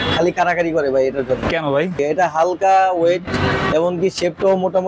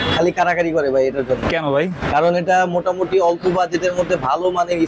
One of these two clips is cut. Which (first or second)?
first